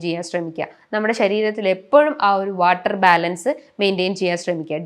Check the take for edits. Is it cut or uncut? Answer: uncut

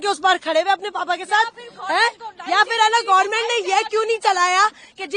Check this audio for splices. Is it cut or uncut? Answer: uncut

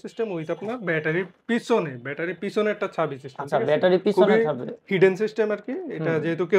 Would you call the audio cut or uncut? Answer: uncut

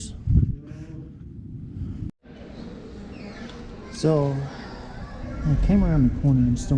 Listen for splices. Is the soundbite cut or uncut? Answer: cut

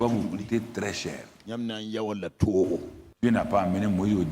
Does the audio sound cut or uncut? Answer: cut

